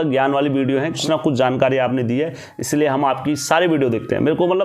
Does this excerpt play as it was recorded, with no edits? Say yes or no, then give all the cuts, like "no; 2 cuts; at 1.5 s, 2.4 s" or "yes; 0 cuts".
no; 1 cut; at 1.0 s